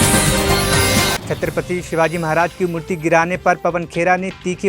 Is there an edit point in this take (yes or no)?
yes